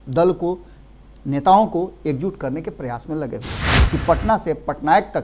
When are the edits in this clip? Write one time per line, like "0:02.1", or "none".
0:03.8